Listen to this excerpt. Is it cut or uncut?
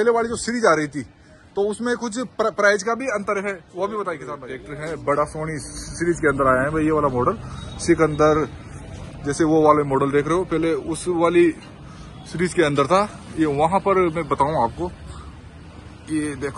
cut